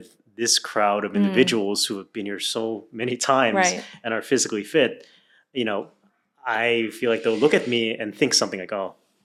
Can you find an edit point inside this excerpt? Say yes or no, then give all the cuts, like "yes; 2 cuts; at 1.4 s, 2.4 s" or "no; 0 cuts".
no; 0 cuts